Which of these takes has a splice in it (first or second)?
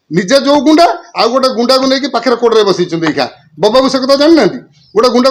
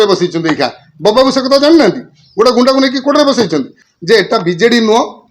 second